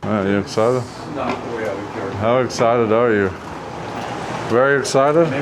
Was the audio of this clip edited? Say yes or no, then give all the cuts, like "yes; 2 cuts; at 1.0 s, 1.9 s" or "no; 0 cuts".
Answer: no; 0 cuts